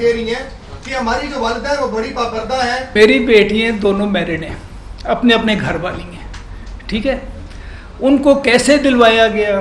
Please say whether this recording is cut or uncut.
cut